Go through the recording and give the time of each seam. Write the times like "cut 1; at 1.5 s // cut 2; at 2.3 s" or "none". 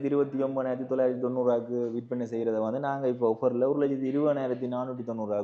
none